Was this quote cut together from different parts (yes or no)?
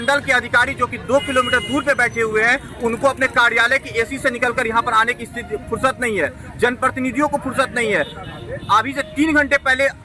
no